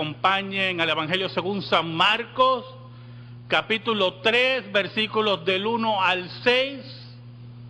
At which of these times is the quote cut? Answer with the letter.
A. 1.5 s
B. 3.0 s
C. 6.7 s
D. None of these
B